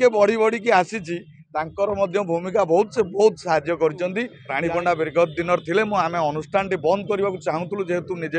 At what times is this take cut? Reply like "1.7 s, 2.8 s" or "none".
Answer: 4.4 s

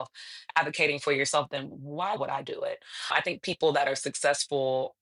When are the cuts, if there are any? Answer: 2.2 s

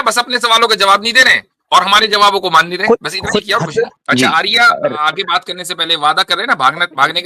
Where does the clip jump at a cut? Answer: 4.0 s

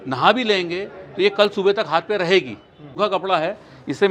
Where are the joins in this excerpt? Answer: 2.9 s

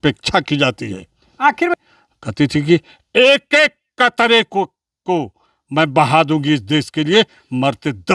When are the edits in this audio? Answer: 1.8 s

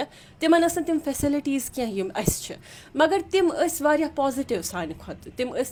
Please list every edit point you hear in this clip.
none

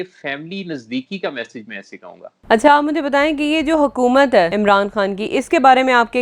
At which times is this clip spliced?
2.3 s, 4.5 s

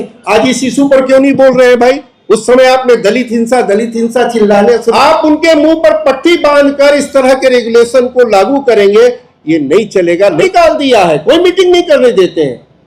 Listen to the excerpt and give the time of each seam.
4.9 s, 10.4 s

